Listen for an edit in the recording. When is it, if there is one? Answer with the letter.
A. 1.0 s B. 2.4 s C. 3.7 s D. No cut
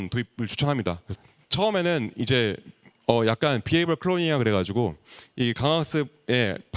A